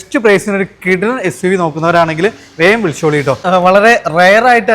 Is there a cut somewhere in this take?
yes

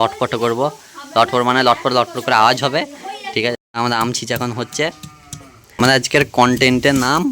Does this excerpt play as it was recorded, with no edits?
no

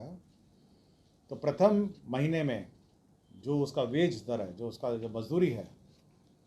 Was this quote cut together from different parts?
no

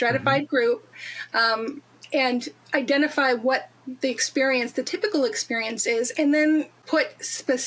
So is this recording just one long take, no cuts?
no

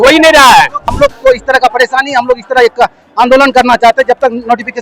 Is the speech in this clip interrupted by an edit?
yes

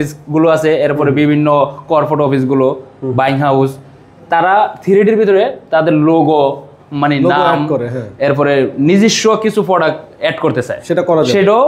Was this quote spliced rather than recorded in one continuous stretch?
no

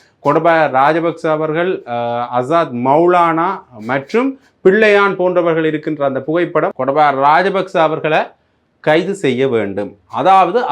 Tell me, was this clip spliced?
yes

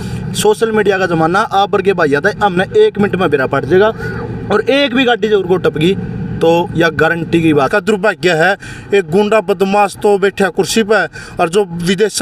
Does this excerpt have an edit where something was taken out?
yes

